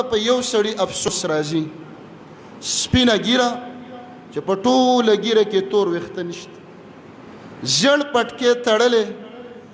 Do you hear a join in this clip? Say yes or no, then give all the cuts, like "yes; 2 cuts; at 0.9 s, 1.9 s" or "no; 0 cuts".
yes; 1 cut; at 1.1 s